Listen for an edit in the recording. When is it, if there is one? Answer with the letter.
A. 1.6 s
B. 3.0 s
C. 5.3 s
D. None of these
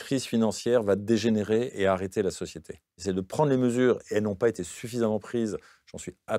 B